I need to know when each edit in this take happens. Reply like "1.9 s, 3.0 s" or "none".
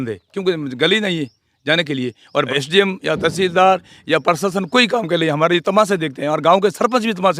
2.5 s